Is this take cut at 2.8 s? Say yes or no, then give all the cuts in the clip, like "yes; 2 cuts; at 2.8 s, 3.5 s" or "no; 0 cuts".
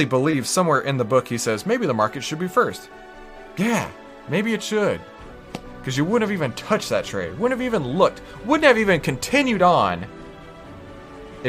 no; 0 cuts